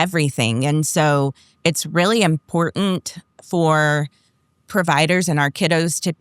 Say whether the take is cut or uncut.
uncut